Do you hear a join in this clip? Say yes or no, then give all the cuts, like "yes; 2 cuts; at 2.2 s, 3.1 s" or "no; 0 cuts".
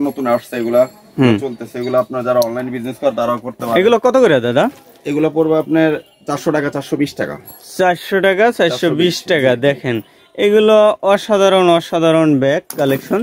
no; 0 cuts